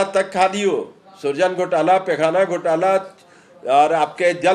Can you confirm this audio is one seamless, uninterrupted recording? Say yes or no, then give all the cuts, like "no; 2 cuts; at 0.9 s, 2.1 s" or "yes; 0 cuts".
yes; 0 cuts